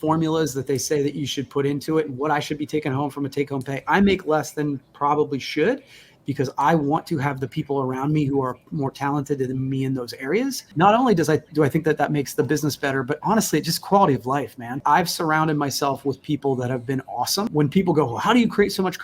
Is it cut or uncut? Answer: cut